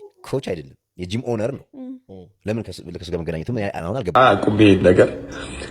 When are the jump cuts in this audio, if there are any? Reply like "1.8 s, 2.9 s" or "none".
4.1 s